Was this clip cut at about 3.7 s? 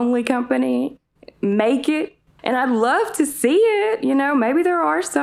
no; 1 cut; at 2.2 s

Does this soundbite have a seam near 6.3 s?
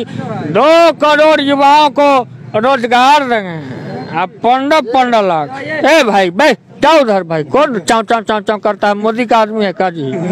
no; 0 cuts

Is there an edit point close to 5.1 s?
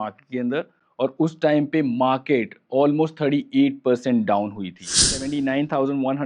yes; 1 cut; at 5.1 s

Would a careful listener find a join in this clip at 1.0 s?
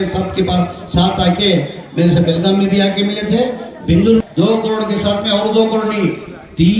no; 1 cut; at 4.2 s

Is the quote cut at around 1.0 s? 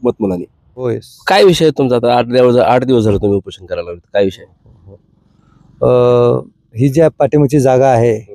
yes; 1 cut; at 1.0 s

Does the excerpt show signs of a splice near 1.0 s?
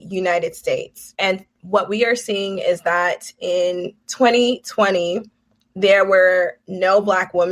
yes; 1 cut; at 1.0 s

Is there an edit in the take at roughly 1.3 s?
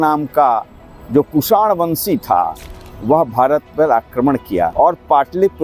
no; 1 cut; at 4.7 s

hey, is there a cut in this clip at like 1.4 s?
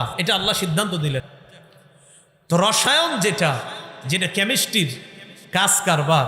yes; 1 cut; at 1.4 s

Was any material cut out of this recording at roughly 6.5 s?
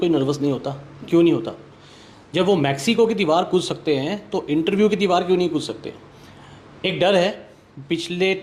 no; 0 cuts

